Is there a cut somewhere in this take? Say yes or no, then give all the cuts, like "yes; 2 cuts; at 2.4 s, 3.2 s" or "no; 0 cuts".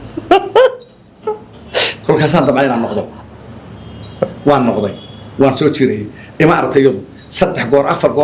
no; 0 cuts